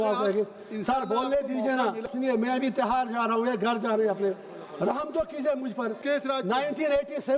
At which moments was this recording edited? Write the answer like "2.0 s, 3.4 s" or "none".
2.1 s, 5.9 s

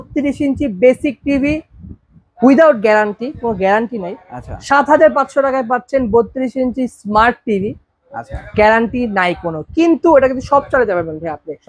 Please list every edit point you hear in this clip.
none

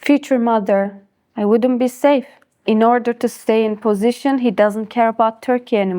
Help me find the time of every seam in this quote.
2.6 s

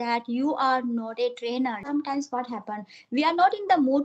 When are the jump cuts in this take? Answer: 1.8 s

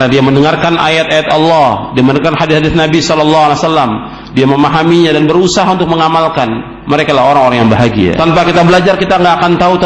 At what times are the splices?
8.2 s

